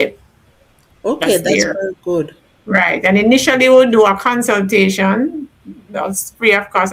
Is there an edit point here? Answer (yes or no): no